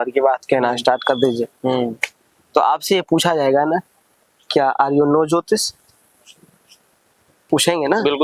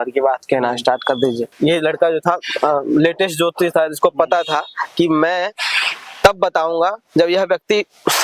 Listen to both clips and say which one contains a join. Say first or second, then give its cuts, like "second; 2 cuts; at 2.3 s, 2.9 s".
second; 1 cut; at 1.5 s